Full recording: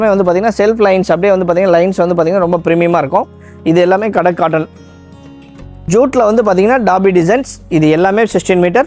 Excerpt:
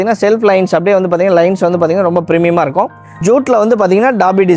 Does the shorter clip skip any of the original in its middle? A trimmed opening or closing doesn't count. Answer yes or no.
yes